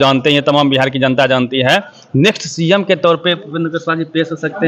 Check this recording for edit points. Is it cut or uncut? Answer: uncut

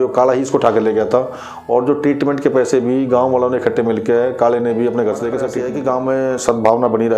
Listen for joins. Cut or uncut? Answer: cut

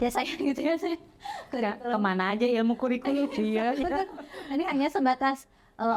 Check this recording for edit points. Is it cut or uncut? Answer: uncut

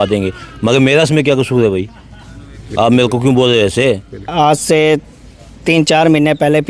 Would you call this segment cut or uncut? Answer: cut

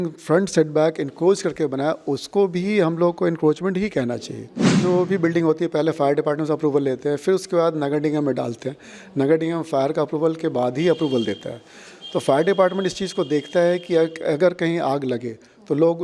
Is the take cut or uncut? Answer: cut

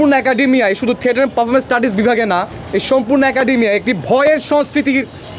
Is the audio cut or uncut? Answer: uncut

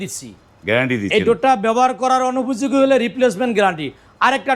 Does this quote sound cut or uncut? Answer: uncut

